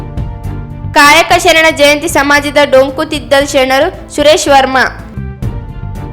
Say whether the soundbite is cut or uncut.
cut